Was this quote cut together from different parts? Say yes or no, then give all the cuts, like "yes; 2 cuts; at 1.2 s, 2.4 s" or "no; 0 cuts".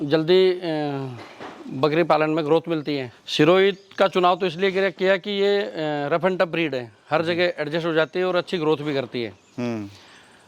yes; 1 cut; at 3.1 s